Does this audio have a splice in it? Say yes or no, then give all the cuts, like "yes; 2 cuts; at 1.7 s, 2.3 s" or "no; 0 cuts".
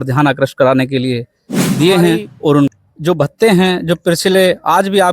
yes; 1 cut; at 2.7 s